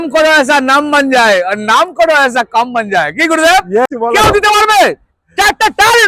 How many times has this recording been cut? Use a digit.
1